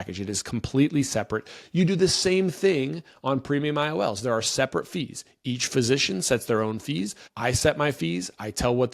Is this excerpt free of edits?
no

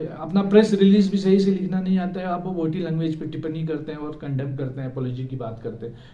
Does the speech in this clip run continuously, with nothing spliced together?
yes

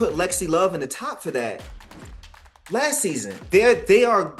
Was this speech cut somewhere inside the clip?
yes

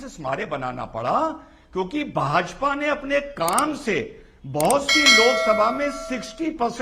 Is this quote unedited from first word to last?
yes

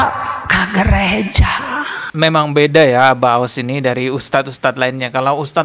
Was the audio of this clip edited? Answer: yes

